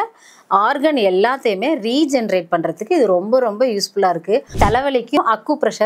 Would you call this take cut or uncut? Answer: cut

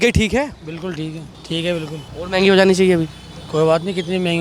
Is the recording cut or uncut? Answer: uncut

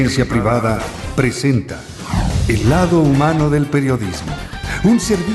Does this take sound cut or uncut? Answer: uncut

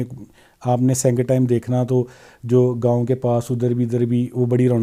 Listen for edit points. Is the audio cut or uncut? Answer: uncut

